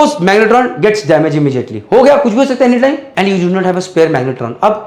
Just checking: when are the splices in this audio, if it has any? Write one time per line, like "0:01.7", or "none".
0:03.1